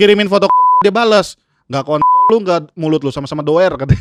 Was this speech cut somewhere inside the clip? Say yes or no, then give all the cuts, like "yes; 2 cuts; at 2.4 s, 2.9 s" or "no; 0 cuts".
no; 0 cuts